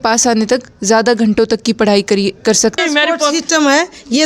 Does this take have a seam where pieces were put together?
yes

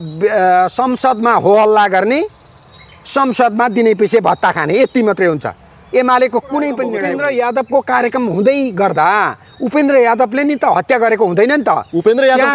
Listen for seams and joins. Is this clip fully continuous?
no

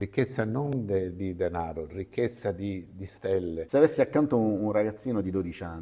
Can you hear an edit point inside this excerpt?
yes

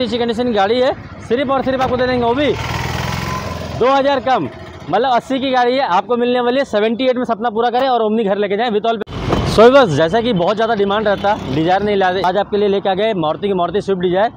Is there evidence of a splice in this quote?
yes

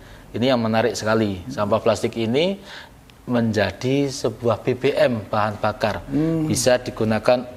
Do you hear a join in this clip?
no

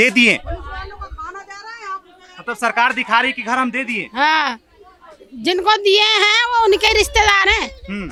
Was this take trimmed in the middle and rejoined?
no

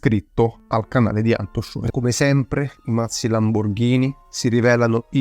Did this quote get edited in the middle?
yes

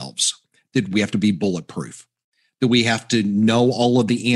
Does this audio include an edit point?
yes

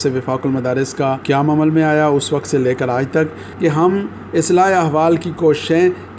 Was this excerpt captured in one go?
no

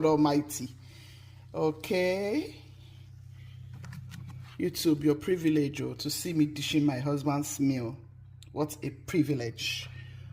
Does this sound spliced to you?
yes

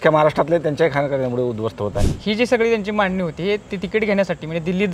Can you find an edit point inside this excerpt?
yes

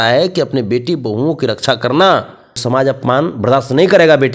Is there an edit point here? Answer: yes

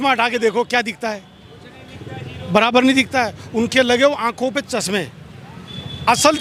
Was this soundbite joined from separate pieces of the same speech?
no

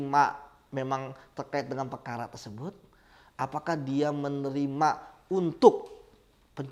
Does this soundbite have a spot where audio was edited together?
no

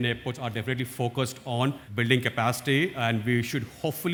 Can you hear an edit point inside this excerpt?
no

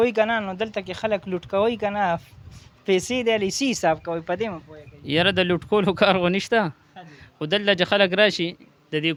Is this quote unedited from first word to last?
yes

